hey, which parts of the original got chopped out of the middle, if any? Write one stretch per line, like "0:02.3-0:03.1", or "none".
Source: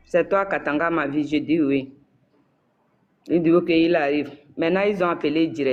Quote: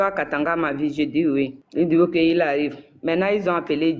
0:02.0-0:03.2